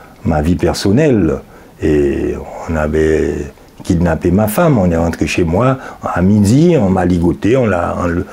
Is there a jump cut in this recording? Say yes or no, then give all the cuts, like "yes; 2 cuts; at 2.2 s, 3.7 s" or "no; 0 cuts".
no; 0 cuts